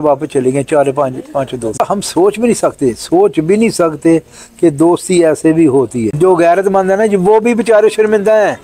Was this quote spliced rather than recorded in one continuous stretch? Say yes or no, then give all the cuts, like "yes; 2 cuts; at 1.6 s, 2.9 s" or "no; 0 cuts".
yes; 2 cuts; at 1.8 s, 6.1 s